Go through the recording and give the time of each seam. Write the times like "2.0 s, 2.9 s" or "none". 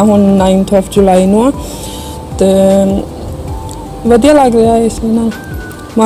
none

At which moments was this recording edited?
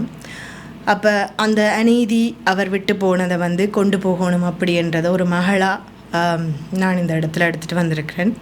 none

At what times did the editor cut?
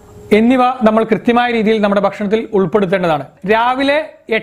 3.3 s

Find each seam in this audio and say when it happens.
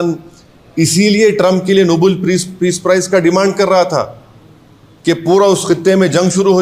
none

